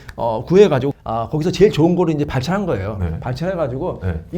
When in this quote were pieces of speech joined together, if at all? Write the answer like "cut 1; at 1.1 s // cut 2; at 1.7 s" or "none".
cut 1; at 1.0 s